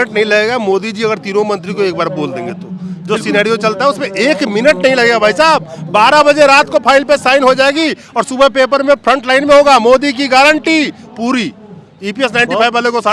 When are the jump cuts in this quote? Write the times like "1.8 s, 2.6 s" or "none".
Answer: none